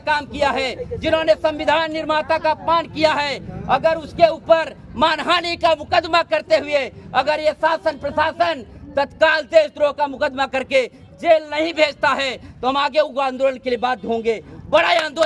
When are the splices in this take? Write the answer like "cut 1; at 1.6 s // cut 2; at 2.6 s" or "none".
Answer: none